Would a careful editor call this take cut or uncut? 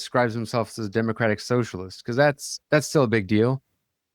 cut